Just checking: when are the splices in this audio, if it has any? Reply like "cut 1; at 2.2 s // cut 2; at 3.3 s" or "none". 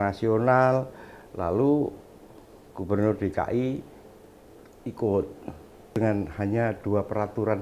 cut 1; at 6.0 s